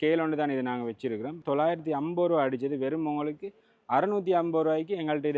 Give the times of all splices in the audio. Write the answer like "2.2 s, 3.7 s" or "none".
1.4 s

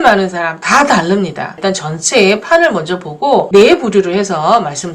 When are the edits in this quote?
1.6 s, 3.5 s

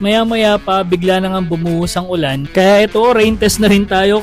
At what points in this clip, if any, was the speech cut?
2.4 s

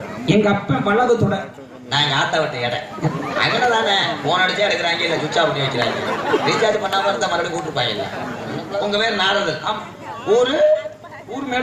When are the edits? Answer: 8.7 s

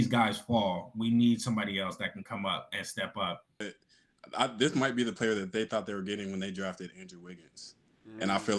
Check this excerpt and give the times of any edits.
3.7 s

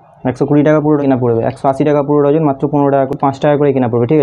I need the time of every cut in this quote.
1.0 s, 3.1 s

